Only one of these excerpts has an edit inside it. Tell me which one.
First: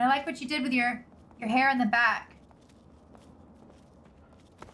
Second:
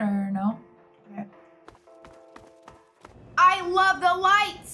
second; 1 cut; at 3.1 s

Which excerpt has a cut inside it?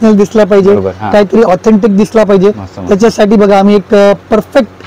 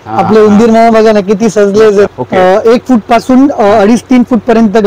second; 1 cut; at 2.1 s

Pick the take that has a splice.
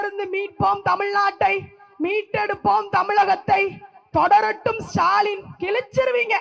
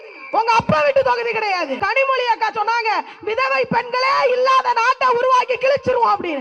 second; 1 cut; at 1.8 s

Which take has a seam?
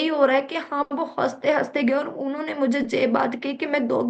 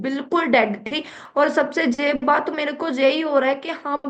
second; 1 cut; at 1.2 s

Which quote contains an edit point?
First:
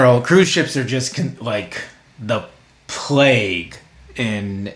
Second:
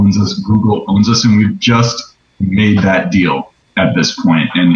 second; 1 cut; at 3.6 s

